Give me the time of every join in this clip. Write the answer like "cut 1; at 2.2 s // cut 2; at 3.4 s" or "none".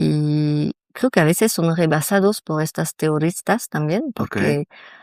none